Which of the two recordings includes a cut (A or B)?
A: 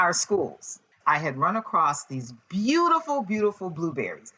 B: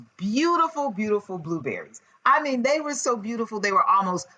A